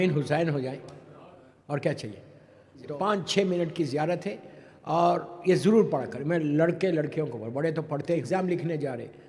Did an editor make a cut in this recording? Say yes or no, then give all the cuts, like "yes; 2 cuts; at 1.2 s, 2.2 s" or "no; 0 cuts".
yes; 2 cuts; at 2.9 s, 8.2 s